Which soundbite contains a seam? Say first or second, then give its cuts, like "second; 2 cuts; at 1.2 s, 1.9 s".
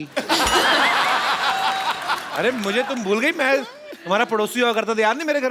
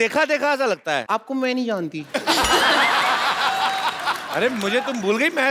second; 1 cut; at 1.0 s